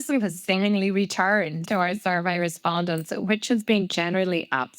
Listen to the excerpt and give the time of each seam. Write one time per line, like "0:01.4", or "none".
0:01.7

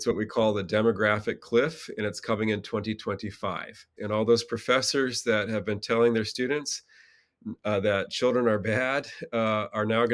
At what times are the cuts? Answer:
0:03.9

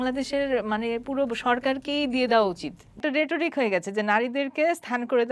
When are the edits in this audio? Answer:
0:03.0

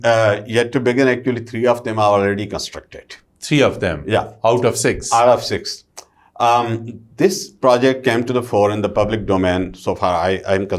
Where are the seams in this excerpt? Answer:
none

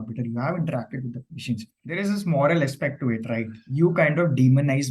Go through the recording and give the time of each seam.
0:01.8

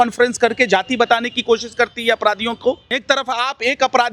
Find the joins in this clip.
0:03.0

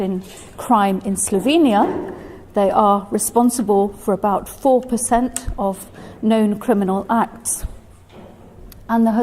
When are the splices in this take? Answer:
0:02.8

